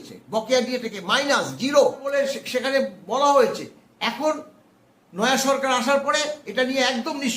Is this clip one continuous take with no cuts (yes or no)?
no